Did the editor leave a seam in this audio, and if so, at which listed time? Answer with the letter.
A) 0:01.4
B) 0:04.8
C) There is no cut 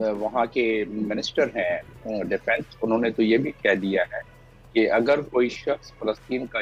C